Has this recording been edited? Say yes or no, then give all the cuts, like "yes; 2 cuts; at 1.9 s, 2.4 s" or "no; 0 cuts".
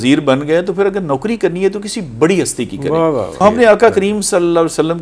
yes; 1 cut; at 3.4 s